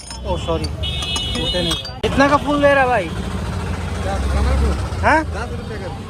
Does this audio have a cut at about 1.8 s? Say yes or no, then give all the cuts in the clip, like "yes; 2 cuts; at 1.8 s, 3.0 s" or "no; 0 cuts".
no; 0 cuts